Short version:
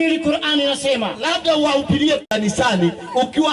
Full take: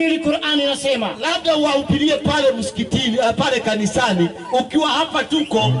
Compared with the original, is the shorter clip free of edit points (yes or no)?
no